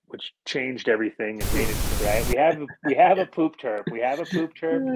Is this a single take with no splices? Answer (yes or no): no